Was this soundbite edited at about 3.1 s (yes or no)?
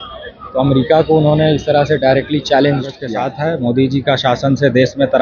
yes